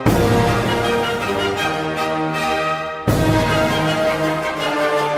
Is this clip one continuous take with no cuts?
yes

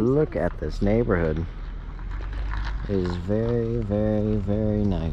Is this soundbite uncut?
yes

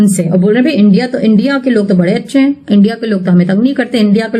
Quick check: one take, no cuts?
yes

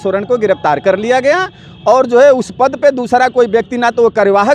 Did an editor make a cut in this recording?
no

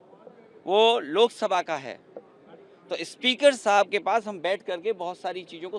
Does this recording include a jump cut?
no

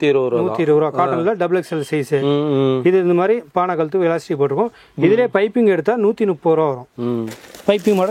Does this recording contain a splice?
no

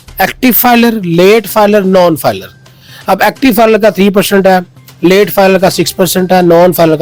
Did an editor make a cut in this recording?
no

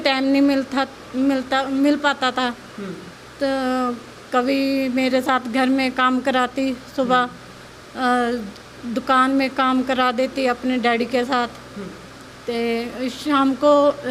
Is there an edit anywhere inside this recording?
no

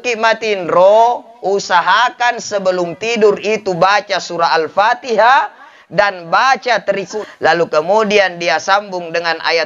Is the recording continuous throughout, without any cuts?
no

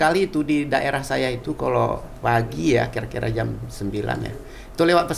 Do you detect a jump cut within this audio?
no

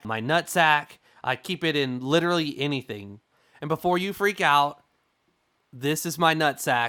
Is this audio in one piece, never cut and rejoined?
yes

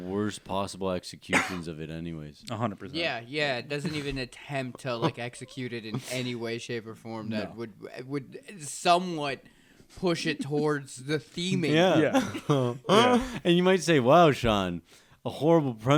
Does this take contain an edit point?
no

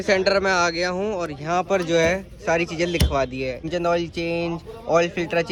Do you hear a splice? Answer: no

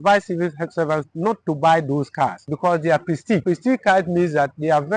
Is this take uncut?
no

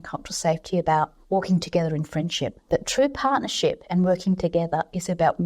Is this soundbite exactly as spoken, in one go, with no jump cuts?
no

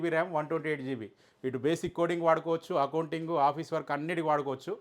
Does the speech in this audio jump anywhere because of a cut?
no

